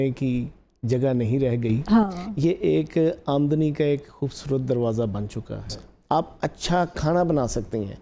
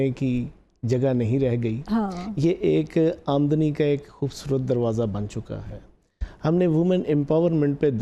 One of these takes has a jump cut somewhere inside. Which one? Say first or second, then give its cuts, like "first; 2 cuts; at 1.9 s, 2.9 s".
first; 1 cut; at 5.9 s